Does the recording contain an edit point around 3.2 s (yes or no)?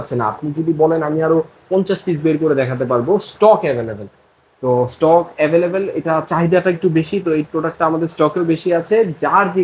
no